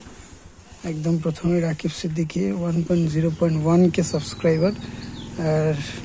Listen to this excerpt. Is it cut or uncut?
uncut